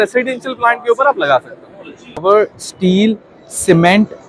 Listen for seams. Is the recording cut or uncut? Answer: cut